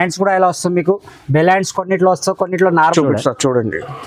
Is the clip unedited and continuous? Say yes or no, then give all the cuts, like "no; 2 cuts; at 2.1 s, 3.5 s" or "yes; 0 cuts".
no; 1 cut; at 2.8 s